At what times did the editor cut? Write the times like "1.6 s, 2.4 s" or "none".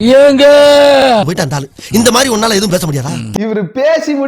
3.3 s